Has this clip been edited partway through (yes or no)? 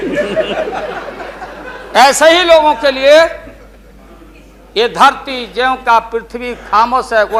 no